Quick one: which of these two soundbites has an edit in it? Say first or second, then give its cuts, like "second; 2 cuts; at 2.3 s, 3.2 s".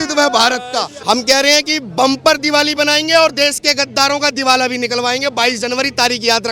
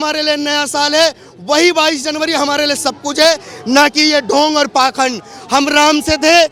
first; 1 cut; at 0.9 s